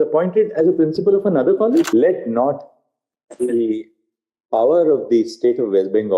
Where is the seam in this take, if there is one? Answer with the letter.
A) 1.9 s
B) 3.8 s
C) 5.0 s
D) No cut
A